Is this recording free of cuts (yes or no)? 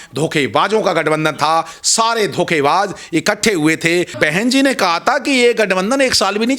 no